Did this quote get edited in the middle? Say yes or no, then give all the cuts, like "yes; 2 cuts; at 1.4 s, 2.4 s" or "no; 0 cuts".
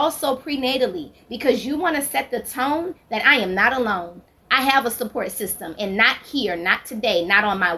no; 0 cuts